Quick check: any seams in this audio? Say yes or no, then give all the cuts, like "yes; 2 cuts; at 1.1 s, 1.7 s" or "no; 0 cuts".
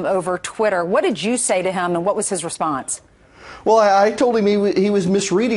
no; 0 cuts